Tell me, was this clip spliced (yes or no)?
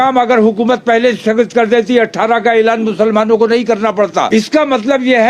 yes